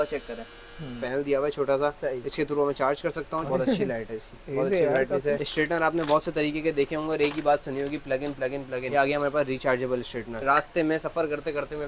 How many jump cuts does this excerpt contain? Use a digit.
5